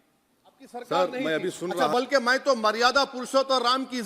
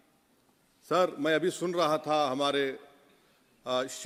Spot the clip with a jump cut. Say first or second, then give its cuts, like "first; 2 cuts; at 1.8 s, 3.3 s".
first; 1 cut; at 1.8 s